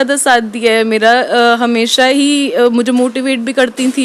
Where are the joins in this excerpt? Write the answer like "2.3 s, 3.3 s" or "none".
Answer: none